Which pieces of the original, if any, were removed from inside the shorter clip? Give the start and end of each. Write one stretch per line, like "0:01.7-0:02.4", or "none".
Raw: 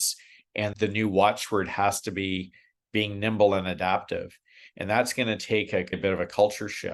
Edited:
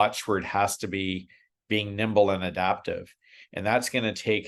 none